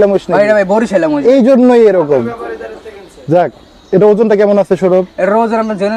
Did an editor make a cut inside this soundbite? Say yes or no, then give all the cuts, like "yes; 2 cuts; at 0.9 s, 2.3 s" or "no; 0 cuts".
no; 0 cuts